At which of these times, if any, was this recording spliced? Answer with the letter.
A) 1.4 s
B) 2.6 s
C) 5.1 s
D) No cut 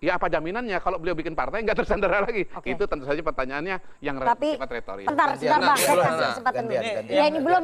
C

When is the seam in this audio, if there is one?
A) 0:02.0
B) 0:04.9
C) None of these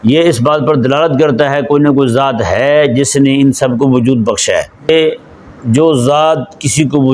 B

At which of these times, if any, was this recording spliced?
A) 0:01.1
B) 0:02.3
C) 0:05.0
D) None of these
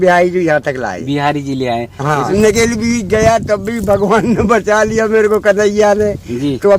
B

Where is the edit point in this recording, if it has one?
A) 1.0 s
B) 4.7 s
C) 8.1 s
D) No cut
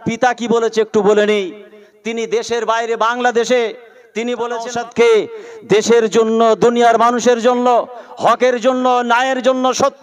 B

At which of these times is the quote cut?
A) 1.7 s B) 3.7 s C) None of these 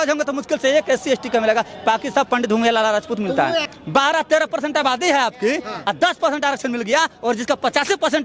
B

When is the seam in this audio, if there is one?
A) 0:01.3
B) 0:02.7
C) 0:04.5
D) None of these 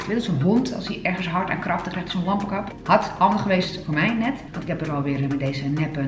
C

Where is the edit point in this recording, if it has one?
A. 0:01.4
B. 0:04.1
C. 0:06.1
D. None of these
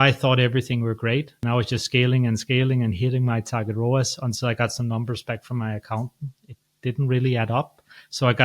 A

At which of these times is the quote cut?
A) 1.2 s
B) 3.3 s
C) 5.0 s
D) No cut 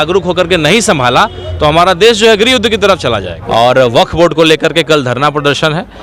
B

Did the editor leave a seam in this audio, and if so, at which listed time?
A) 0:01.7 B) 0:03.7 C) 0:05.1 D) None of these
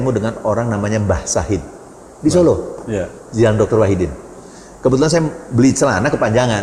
D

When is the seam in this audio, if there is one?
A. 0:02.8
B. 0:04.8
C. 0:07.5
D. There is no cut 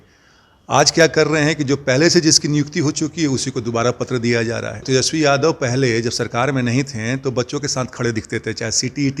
B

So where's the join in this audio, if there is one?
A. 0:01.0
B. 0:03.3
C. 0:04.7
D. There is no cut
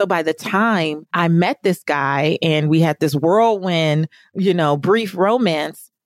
A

